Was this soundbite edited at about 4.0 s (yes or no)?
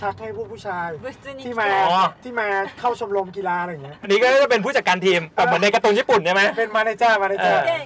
yes